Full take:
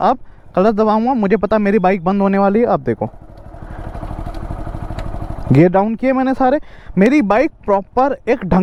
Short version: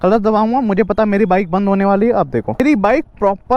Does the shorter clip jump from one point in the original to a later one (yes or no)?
yes